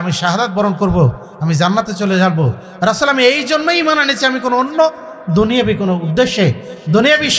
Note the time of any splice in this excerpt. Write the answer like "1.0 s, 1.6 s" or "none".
none

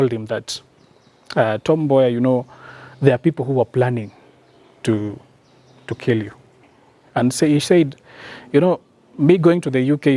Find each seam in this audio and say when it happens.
6.7 s

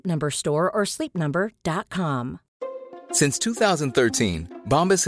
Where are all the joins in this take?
2.4 s

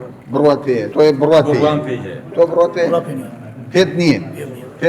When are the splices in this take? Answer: 0.9 s, 2.2 s

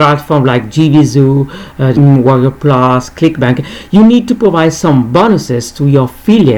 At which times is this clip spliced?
2.0 s

